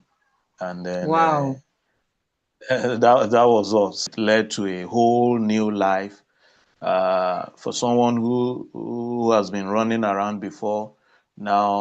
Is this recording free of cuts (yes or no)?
no